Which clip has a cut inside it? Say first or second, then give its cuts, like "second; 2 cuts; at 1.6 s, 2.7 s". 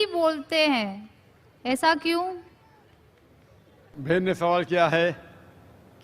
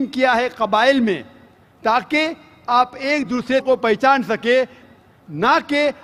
first; 1 cut; at 4.1 s